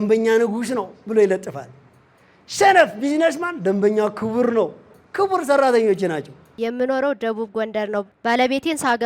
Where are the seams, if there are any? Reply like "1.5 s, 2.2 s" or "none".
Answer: 6.6 s, 8.1 s